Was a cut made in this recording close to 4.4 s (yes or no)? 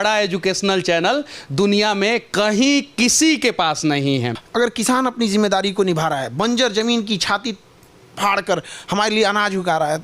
yes